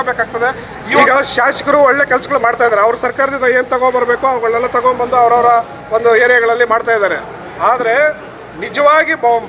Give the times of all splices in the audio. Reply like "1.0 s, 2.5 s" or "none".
1.0 s